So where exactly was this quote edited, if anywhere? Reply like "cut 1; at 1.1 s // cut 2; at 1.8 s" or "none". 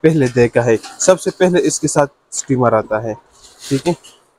none